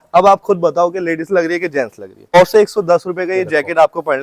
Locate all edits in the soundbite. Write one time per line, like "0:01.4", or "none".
0:02.3